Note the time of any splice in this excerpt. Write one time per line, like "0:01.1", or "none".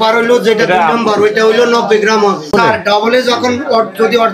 0:02.5